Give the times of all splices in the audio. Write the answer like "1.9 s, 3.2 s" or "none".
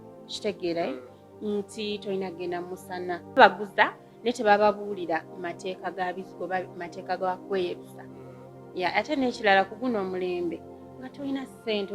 3.4 s